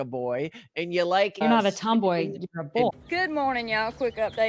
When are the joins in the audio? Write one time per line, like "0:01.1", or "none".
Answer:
0:03.0